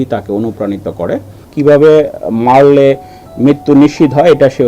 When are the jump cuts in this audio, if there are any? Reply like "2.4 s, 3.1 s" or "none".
1.4 s